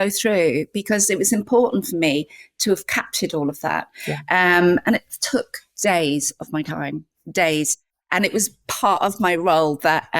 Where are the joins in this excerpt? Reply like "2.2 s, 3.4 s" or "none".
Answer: none